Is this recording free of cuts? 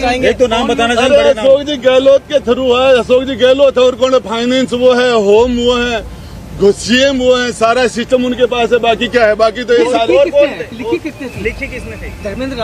yes; 0 cuts

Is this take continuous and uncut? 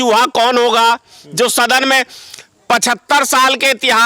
yes; 0 cuts

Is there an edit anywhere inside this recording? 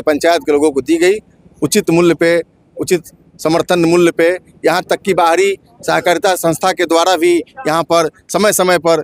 no; 0 cuts

